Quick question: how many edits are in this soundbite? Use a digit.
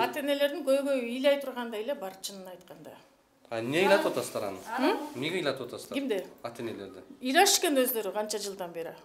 0